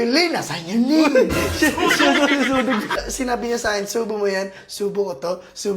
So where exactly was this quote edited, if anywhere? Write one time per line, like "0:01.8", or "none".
0:03.0